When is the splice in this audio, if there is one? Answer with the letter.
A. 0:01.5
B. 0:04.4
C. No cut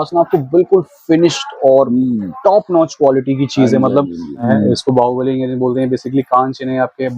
B